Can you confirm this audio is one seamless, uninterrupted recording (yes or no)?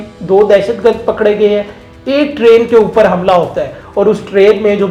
yes